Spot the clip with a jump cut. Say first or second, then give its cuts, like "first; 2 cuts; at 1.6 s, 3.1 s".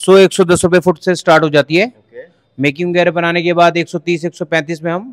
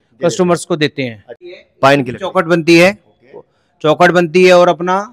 second; 1 cut; at 1.5 s